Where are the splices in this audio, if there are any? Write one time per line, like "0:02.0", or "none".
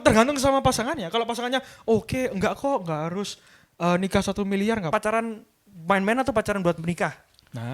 0:04.9

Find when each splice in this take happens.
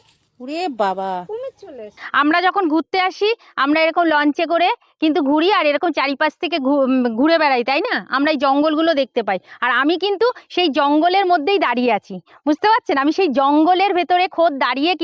0:02.0

